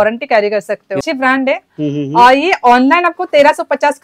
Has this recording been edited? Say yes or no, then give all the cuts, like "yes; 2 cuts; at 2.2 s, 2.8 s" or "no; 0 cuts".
yes; 1 cut; at 1.0 s